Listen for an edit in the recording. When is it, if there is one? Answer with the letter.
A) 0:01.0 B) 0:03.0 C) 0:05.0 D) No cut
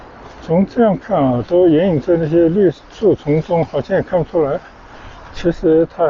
D